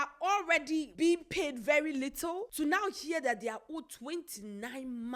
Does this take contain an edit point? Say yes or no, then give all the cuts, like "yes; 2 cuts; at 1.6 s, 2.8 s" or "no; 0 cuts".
yes; 2 cuts; at 0.9 s, 2.5 s